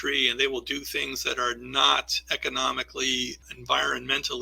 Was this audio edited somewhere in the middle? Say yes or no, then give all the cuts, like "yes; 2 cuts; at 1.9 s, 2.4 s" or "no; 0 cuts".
yes; 1 cut; at 3.5 s